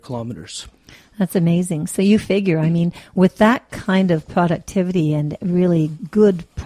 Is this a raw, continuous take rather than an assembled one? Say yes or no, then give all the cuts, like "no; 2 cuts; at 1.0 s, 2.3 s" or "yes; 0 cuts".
no; 1 cut; at 5.5 s